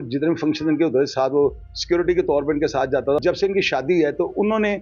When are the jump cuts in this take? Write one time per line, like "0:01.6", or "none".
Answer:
0:03.2